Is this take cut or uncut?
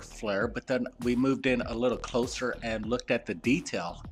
uncut